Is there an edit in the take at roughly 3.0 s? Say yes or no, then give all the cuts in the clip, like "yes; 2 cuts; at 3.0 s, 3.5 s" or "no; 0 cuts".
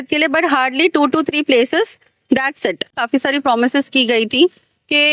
yes; 1 cut; at 3.0 s